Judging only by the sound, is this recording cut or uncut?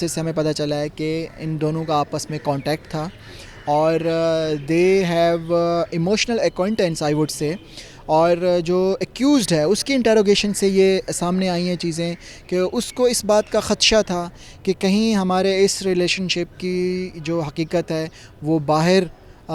uncut